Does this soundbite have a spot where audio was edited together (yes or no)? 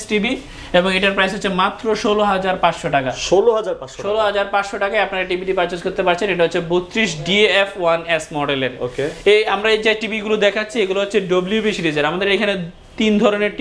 no